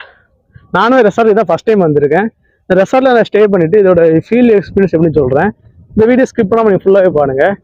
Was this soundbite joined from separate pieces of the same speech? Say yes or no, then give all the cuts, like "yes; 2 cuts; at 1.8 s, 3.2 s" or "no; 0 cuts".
no; 0 cuts